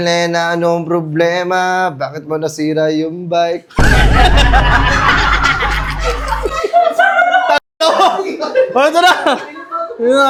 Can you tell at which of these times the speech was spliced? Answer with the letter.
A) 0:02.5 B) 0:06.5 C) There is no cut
C